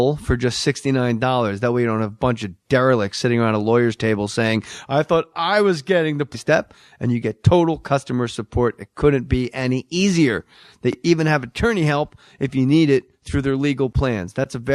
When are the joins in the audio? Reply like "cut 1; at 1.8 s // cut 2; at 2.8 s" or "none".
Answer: none